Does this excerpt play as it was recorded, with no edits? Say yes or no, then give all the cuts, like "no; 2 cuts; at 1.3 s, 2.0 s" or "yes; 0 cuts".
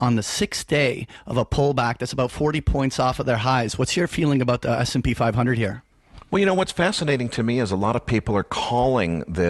no; 1 cut; at 6.3 s